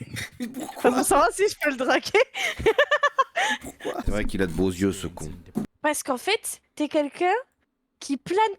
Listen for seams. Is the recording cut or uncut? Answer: cut